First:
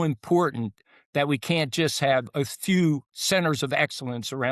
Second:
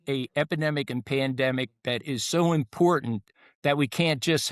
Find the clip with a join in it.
first; 1 cut; at 3.1 s

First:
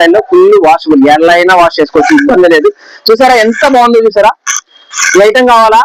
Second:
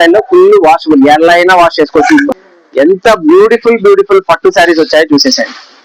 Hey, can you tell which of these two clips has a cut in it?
second; 1 cut; at 2.3 s

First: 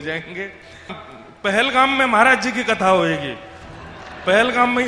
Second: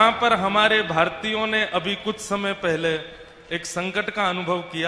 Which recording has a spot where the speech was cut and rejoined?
first; 1 cut; at 1.0 s

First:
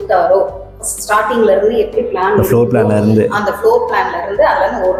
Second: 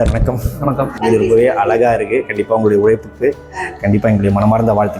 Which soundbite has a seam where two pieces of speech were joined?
second; 1 cut; at 0.9 s

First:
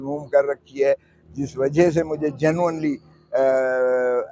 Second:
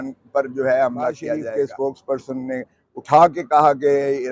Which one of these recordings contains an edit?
second; 1 cut; at 1.5 s

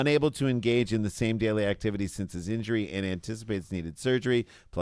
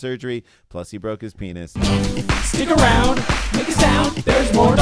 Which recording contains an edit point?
second; 1 cut; at 1.7 s

